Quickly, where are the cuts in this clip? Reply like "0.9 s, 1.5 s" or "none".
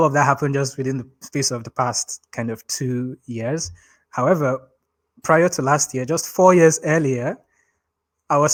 none